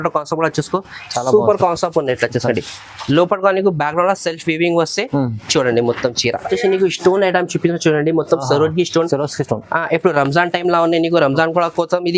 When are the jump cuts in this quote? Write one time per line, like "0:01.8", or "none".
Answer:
0:06.5